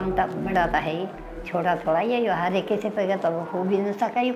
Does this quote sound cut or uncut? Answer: uncut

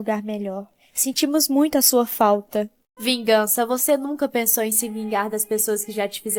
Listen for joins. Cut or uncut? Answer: cut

